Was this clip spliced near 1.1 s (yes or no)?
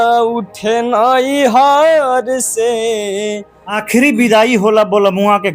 no